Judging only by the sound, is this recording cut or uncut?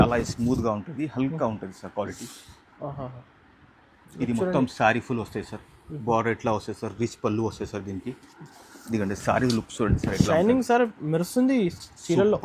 uncut